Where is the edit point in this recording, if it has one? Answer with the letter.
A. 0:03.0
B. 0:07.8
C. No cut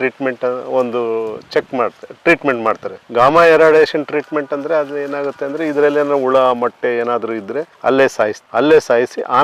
C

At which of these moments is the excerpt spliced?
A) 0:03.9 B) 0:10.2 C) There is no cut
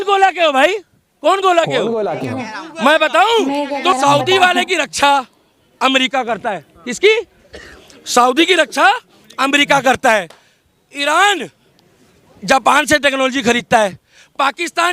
A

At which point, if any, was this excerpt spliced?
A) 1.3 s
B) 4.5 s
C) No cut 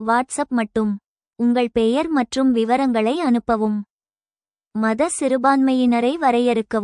B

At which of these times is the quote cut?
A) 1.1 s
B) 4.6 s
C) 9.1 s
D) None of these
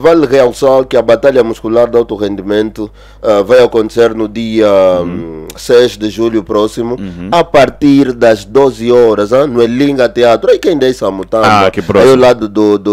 D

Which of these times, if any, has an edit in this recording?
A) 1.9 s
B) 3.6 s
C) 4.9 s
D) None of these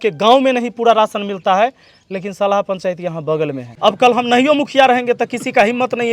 B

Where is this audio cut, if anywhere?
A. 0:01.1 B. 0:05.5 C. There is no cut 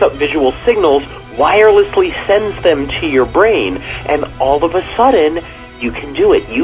C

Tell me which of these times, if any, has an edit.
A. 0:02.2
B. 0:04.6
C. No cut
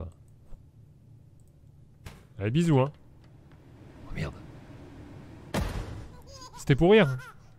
C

